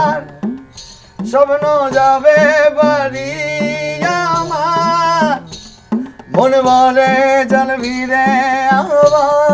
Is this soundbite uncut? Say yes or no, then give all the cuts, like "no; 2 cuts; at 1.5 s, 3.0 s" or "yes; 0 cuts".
yes; 0 cuts